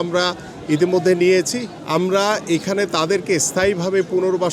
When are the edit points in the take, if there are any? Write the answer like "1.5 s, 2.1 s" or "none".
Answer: 1.7 s

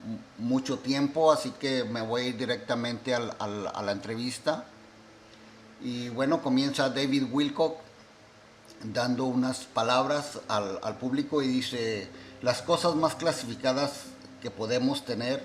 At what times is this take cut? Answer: 8.3 s

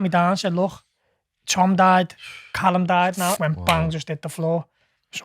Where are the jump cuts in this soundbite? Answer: 3.4 s

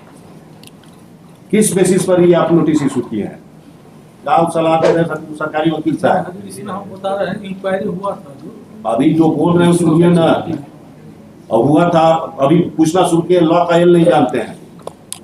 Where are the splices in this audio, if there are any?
4.2 s

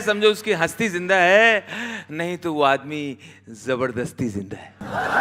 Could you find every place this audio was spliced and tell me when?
none

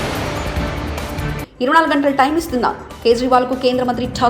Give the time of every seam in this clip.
none

